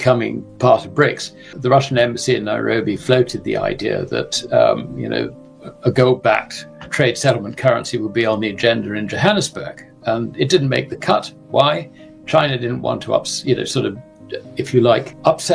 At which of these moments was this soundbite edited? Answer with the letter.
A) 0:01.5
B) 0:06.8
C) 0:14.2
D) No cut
A